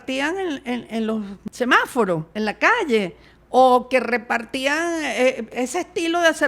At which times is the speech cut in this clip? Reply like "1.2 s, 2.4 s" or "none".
1.4 s, 2.3 s, 5.5 s